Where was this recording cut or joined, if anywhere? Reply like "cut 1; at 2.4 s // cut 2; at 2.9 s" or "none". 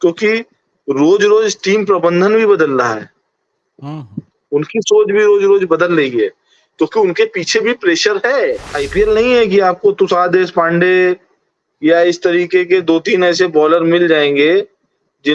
cut 1; at 8.7 s